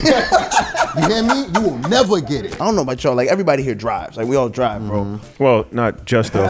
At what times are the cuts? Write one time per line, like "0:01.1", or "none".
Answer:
0:02.4